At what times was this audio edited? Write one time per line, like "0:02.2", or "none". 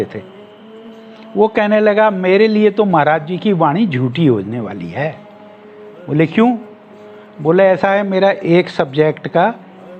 none